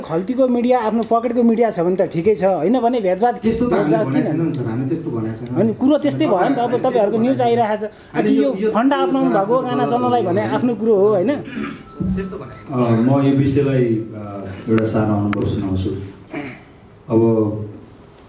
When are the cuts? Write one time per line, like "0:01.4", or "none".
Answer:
none